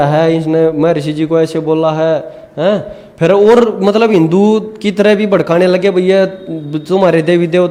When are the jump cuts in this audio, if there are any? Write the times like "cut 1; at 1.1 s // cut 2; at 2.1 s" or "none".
none